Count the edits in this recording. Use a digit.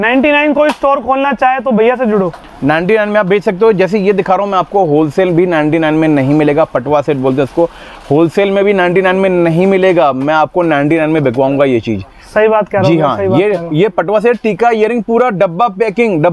0